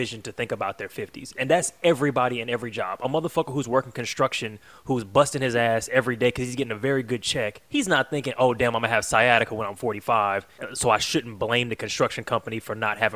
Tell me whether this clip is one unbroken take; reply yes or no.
no